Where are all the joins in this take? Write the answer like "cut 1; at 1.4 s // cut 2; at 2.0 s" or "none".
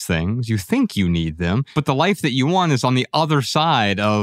cut 1; at 1.7 s